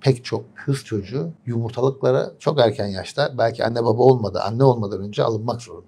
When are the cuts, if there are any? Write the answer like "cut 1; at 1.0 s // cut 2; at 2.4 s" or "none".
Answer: cut 1; at 1.4 s